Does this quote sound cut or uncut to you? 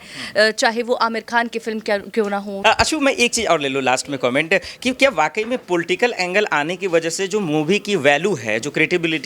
cut